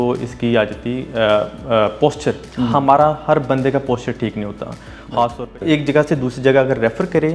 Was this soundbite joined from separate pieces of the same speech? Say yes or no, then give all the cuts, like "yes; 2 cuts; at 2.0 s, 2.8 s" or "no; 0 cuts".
yes; 2 cuts; at 2.5 s, 5.5 s